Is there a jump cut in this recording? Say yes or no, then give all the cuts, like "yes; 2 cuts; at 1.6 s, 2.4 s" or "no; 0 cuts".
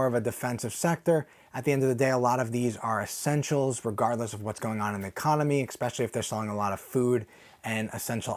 no; 0 cuts